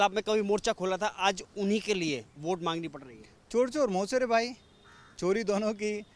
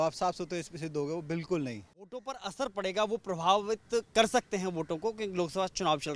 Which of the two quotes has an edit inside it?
second; 1 cut; at 2.1 s

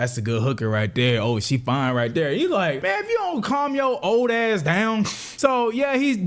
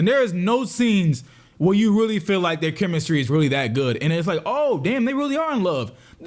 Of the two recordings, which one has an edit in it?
first; 2 cuts; at 2.8 s, 5.2 s

